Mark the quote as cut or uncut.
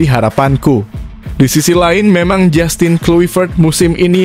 uncut